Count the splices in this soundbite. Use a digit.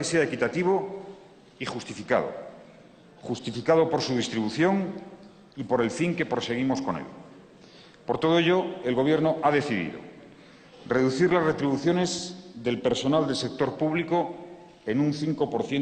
1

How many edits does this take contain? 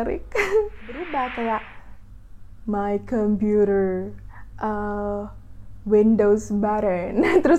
1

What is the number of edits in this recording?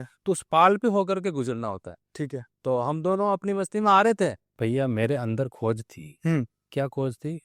1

